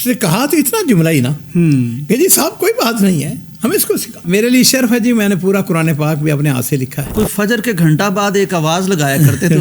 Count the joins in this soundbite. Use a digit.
2